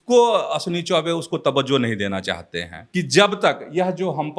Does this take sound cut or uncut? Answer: cut